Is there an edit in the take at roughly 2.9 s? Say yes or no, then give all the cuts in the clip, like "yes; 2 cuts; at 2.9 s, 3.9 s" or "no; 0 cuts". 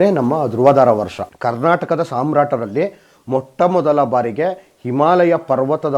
no; 1 cut; at 1.2 s